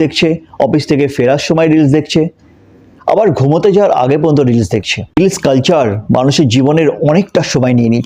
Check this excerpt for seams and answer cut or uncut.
cut